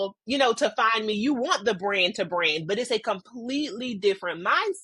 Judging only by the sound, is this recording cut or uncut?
uncut